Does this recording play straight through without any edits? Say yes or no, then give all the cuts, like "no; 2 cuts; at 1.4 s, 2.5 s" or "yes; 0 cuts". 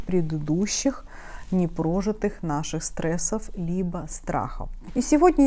yes; 0 cuts